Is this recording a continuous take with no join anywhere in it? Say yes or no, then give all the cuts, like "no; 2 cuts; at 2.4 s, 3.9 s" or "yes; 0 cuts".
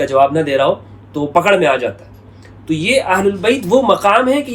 yes; 0 cuts